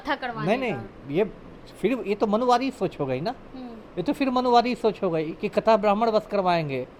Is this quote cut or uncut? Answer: uncut